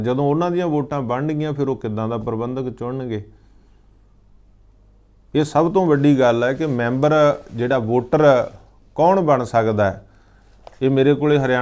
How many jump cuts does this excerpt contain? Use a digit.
0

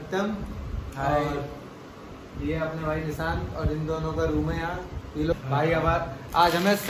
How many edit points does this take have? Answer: 1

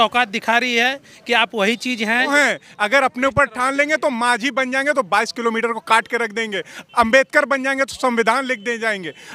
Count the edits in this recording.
1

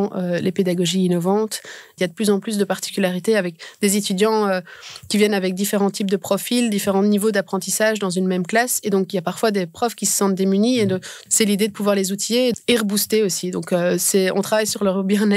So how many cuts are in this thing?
3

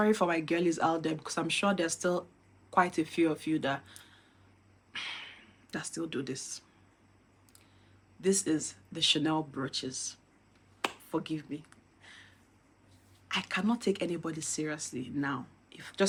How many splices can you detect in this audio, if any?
0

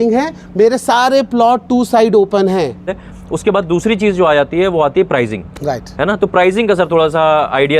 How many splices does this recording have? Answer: 1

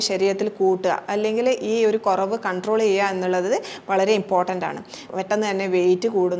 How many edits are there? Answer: 1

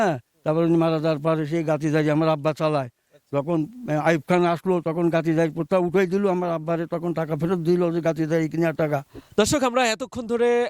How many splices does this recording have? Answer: 1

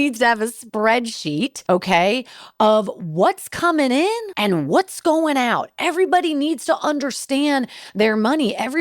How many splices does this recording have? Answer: 2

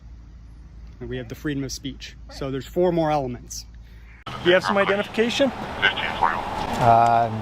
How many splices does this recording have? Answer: 1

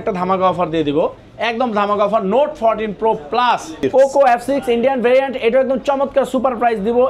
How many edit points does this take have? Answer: 1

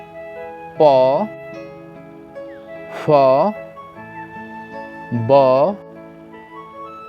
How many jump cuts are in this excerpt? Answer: 0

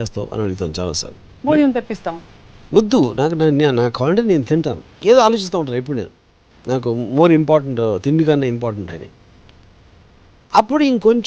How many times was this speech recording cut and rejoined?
1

